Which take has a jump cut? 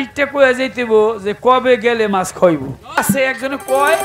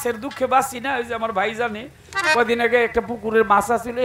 first; 1 cut; at 3.0 s

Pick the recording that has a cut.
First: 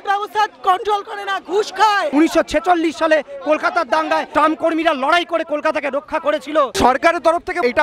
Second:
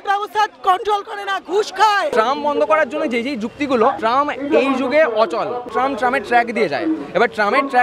first; 2 cuts; at 2.1 s, 6.7 s

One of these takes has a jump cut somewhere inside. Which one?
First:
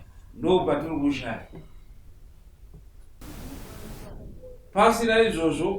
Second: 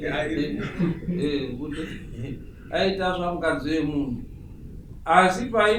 first; 1 cut; at 3.1 s

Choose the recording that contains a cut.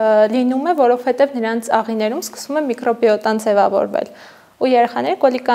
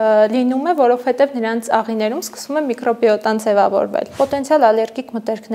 second; 1 cut; at 4.1 s

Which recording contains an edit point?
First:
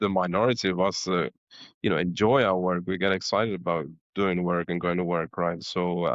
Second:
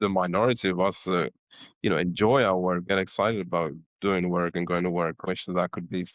second; 2 cuts; at 2.8 s, 5.2 s

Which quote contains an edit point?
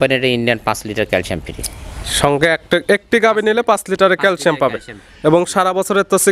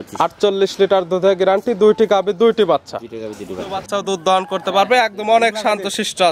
second; 1 cut; at 3.8 s

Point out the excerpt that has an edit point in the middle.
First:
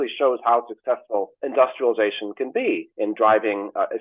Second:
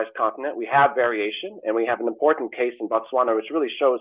first; 2 cuts; at 1.4 s, 2.9 s

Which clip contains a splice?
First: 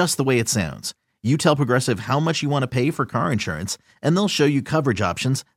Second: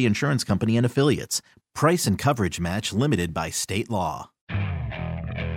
second; 1 cut; at 4.3 s

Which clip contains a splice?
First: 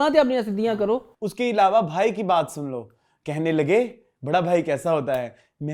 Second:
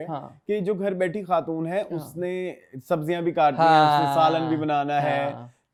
first; 1 cut; at 1.2 s

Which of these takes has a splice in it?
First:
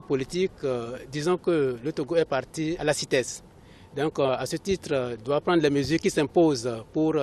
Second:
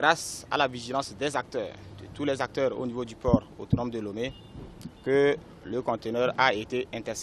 first; 1 cut; at 2.8 s

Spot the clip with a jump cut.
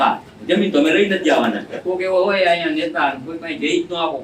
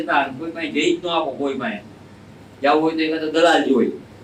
first; 1 cut; at 1.7 s

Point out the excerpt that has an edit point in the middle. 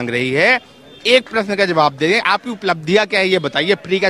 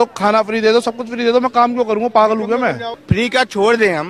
second; 1 cut; at 2.9 s

